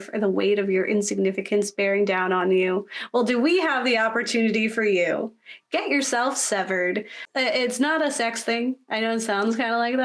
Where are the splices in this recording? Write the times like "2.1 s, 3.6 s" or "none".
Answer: 7.2 s